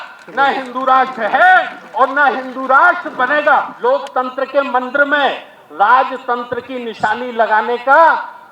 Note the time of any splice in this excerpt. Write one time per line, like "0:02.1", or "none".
0:03.7